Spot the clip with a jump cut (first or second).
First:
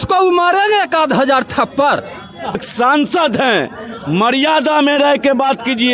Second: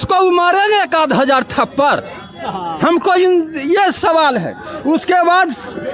first